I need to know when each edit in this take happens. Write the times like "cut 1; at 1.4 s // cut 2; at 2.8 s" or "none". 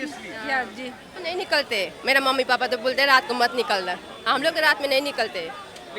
cut 1; at 1.2 s